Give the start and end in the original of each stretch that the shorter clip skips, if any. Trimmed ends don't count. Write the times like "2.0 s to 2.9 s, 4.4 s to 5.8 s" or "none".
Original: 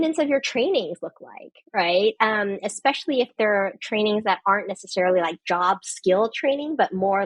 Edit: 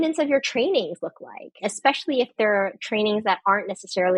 1.6 s to 2.6 s